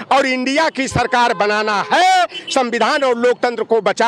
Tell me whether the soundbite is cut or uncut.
uncut